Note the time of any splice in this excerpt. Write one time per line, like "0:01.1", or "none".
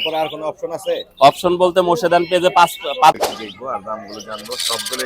0:03.2